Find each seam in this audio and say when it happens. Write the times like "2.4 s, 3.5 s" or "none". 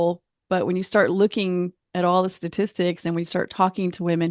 none